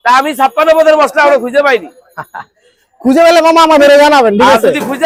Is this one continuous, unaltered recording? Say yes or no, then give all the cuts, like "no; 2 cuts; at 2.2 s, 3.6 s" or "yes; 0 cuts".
yes; 0 cuts